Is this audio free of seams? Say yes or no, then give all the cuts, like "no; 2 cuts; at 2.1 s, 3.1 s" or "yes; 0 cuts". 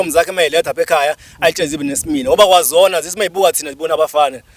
yes; 0 cuts